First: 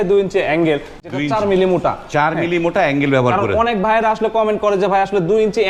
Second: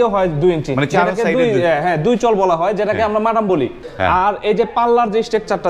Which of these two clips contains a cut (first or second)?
second